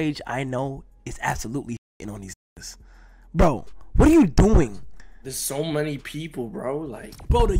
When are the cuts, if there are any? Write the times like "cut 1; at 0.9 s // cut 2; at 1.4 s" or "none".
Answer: none